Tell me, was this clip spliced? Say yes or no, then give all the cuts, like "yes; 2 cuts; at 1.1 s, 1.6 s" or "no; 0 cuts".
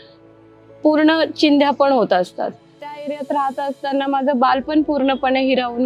yes; 1 cut; at 2.9 s